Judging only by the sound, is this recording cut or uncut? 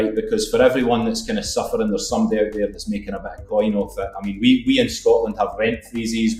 uncut